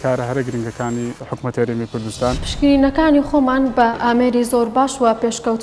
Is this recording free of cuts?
no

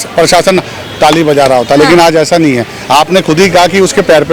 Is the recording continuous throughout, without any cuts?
yes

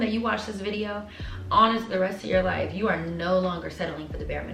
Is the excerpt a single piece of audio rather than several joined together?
yes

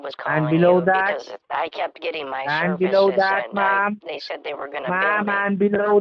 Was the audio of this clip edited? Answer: no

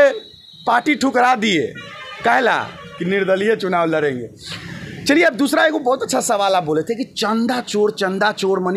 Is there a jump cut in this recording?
no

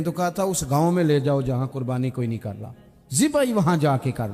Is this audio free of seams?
no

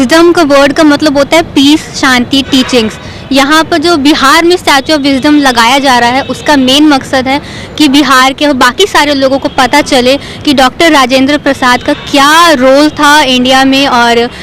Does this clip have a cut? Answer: no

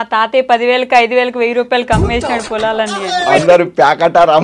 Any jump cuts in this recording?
yes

